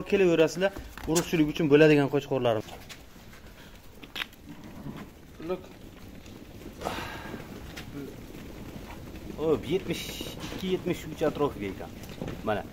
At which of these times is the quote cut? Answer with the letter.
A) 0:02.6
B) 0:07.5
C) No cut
A